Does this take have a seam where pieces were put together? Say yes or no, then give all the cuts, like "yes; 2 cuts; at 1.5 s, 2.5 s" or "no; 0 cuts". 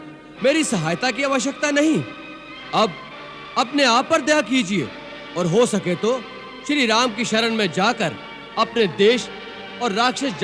no; 0 cuts